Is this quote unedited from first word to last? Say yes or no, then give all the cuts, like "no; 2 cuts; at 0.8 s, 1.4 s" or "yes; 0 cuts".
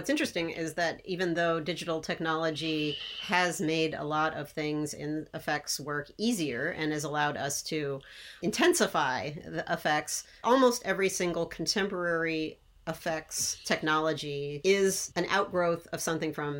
yes; 0 cuts